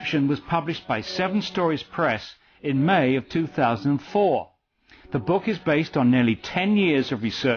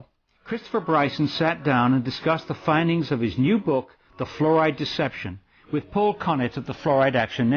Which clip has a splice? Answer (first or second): first